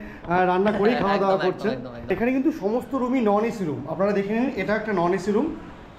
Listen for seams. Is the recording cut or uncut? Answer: cut